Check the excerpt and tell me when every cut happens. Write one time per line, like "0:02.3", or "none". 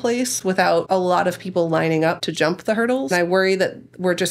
0:00.9
0:02.8